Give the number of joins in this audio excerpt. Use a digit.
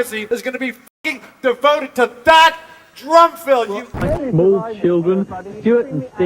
1